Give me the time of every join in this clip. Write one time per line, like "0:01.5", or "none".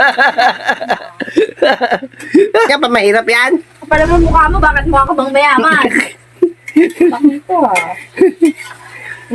0:02.7